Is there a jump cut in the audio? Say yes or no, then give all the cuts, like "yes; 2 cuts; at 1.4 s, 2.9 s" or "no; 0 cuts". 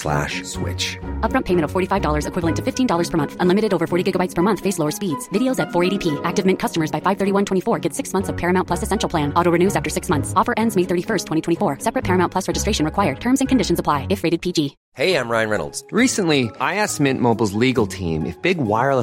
yes; 1 cut; at 14.8 s